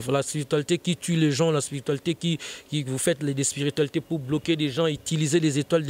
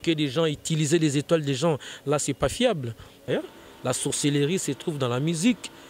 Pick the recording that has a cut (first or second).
second